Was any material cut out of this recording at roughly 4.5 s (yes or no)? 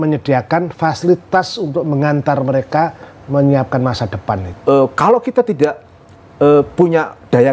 yes